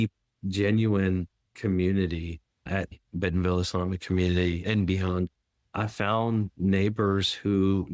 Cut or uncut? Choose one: cut